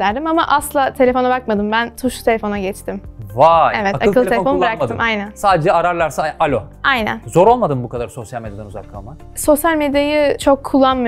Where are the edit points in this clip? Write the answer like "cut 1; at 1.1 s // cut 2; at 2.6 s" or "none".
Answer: none